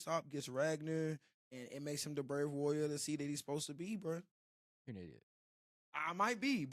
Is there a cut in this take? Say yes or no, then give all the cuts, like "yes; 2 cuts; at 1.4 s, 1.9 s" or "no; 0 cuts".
no; 0 cuts